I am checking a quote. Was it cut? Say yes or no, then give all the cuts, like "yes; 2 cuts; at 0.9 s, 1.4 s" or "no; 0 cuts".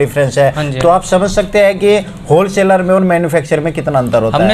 no; 0 cuts